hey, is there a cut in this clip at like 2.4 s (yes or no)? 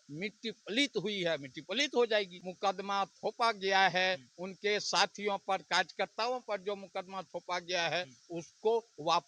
yes